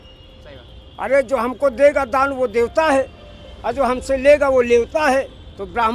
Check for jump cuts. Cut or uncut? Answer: uncut